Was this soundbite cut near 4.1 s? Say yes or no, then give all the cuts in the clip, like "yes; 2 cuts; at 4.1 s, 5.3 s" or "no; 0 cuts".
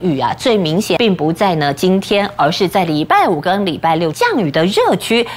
yes; 2 cuts; at 1.0 s, 4.1 s